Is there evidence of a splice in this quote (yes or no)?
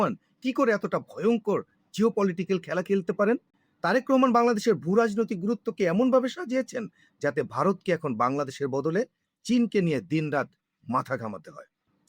yes